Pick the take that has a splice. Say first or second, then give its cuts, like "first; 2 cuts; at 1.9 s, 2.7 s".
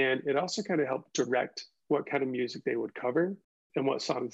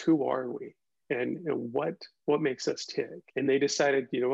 second; 1 cut; at 3.2 s